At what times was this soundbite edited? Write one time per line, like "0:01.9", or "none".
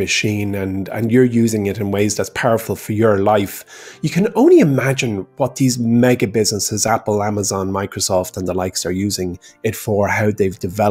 none